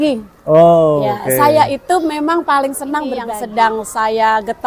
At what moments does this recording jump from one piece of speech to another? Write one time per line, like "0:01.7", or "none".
0:03.3